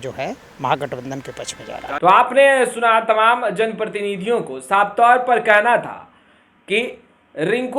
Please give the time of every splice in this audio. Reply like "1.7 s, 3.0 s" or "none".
none